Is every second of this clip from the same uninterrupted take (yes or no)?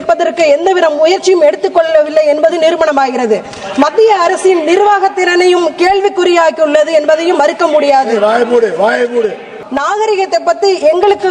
no